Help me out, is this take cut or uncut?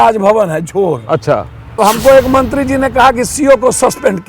cut